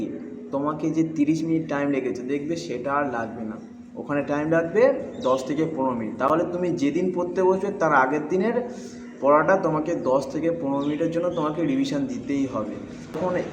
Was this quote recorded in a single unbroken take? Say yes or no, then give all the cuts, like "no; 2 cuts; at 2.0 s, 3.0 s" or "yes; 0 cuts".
yes; 0 cuts